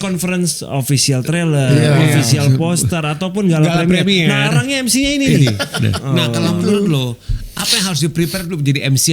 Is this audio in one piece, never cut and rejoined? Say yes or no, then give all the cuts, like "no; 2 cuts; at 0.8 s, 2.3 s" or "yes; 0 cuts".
no; 1 cut; at 6.0 s